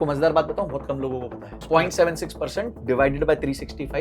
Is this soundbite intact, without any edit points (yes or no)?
no